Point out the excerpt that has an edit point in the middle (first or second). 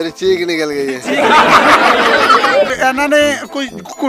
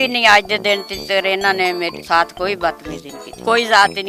first